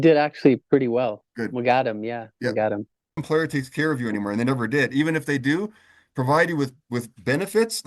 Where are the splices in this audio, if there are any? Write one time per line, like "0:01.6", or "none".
0:03.2